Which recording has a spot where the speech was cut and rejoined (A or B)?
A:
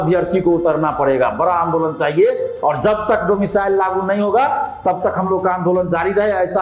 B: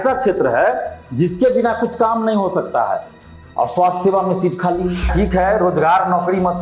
B